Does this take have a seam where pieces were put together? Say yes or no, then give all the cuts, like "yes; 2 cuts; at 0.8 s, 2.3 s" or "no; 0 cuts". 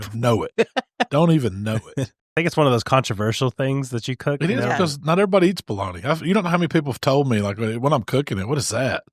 yes; 1 cut; at 2.2 s